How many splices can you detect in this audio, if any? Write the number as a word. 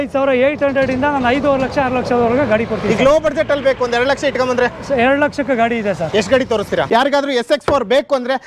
one